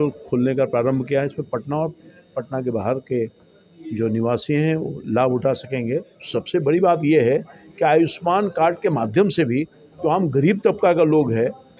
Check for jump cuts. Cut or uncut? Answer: cut